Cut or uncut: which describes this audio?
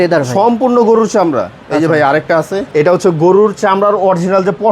cut